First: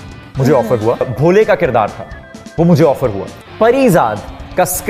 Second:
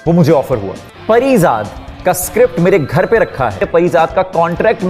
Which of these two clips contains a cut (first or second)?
second